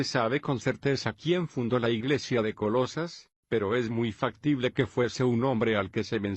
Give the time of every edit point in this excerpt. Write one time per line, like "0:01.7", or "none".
0:03.1